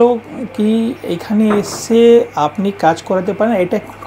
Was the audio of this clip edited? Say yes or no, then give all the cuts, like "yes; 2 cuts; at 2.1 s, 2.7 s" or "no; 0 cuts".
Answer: no; 0 cuts